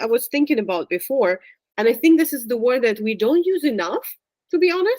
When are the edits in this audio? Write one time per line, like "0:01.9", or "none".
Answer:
0:01.6